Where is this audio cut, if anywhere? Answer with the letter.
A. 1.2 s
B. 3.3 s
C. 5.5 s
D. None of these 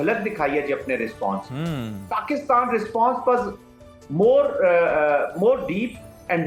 D